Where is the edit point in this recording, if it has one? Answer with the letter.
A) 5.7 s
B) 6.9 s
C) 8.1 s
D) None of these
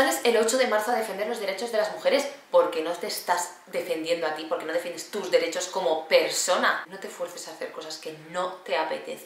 B